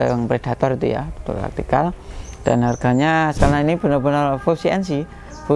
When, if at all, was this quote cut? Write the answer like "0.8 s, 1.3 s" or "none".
3.4 s